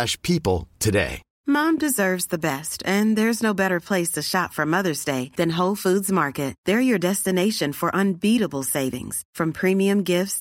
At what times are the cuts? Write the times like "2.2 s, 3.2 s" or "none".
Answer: 1.2 s